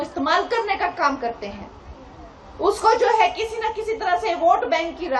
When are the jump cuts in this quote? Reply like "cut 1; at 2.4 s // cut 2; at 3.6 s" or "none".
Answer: none